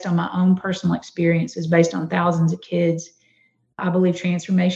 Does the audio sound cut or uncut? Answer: cut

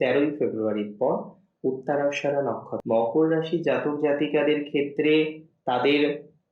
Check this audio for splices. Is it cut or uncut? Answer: cut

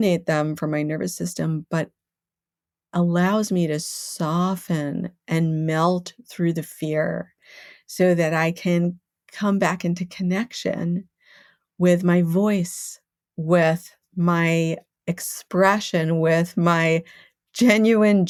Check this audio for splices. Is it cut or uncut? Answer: uncut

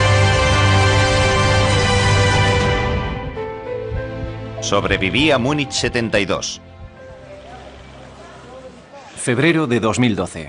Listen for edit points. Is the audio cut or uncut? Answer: cut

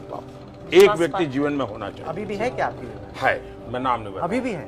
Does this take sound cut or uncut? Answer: uncut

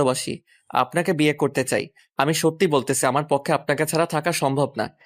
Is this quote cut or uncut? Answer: cut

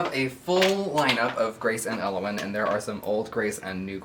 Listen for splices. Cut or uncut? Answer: uncut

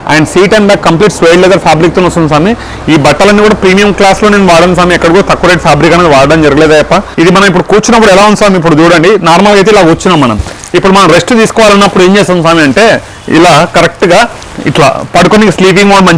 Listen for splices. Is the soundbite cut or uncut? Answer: cut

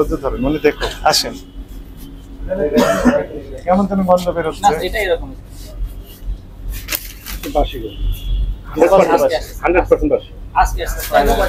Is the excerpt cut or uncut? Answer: uncut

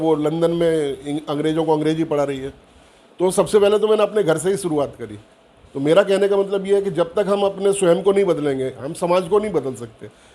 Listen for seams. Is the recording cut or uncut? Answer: uncut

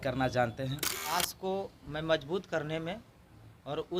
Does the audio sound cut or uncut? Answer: cut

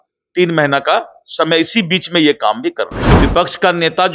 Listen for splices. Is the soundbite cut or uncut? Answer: cut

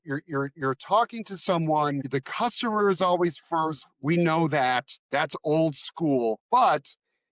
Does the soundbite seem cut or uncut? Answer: cut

